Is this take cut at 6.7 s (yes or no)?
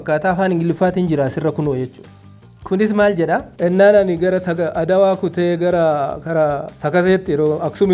no